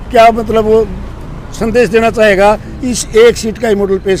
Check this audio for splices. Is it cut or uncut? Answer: uncut